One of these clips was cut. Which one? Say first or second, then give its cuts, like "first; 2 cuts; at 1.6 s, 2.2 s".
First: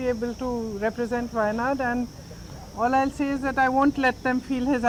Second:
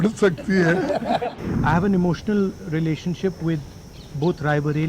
second; 1 cut; at 1.3 s